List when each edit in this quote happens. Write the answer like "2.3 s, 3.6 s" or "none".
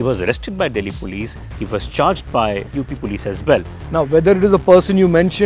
2.7 s, 3.8 s